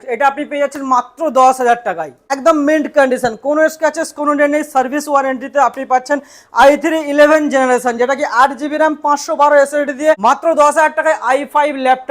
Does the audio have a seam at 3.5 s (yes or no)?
no